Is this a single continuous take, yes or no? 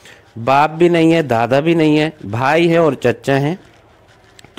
yes